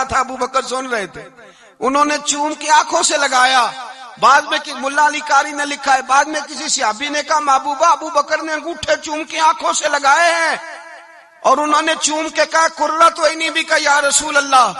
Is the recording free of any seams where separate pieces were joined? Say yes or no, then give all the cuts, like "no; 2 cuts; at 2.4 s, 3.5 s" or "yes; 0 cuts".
yes; 0 cuts